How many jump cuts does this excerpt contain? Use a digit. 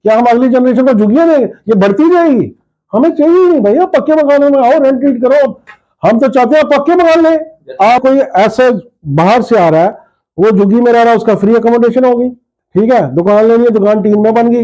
1